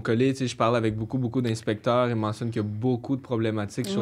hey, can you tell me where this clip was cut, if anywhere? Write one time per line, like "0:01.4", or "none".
none